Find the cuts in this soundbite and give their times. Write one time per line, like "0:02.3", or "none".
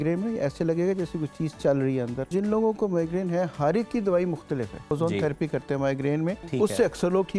0:02.3
0:04.9
0:06.4